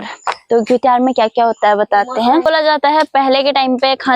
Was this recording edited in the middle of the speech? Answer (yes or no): yes